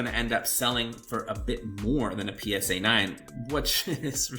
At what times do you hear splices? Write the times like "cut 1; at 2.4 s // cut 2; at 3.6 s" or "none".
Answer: none